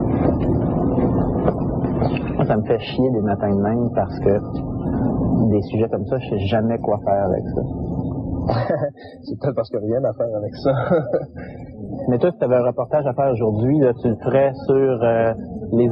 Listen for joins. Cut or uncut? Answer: cut